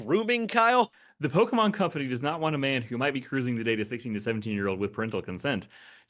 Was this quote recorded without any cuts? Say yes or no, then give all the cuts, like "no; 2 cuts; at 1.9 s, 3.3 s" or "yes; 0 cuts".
no; 1 cut; at 1.0 s